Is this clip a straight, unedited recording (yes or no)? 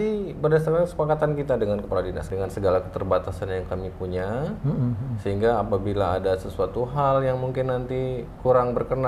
no